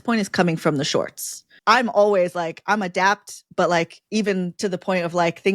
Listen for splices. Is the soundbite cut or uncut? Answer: cut